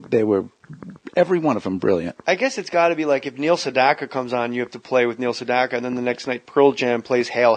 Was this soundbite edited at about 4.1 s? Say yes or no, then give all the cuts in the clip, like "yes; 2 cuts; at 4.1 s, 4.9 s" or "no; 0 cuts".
yes; 1 cut; at 4.1 s